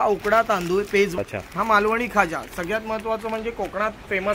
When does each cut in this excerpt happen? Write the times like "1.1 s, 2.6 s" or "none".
1.2 s

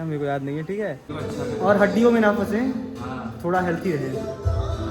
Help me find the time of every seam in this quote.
1.1 s

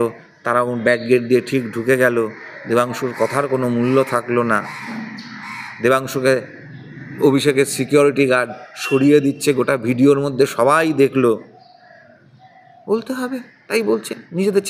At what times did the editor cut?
none

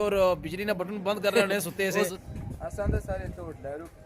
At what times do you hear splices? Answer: 2.2 s

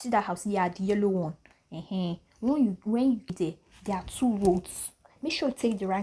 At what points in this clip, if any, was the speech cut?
3.3 s

